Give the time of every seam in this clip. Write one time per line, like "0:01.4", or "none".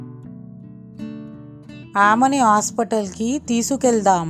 0:01.3